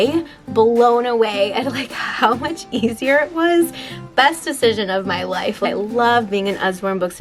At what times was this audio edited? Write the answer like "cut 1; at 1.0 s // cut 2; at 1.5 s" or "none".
cut 1; at 5.7 s